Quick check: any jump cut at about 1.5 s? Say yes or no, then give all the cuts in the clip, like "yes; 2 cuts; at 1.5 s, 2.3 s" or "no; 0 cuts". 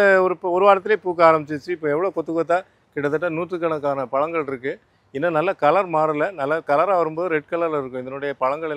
no; 0 cuts